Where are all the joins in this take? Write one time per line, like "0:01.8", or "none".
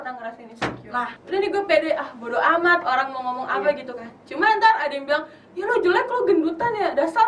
0:01.2